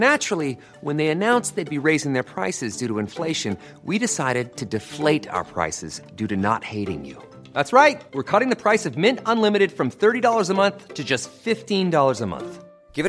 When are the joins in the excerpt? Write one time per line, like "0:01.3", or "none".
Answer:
none